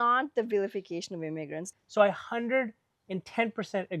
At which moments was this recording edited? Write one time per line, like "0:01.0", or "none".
0:01.6